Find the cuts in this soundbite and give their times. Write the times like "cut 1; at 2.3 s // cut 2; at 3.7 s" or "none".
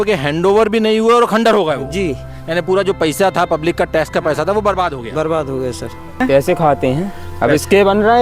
cut 1; at 6.2 s

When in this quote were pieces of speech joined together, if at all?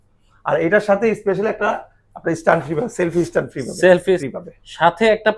cut 1; at 4.2 s

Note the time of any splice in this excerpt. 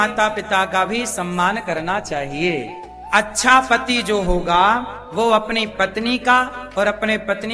cut 1; at 3.0 s

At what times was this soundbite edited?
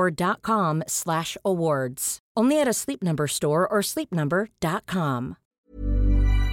cut 1; at 5.4 s

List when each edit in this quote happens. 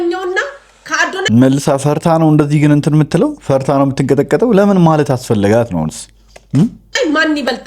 none

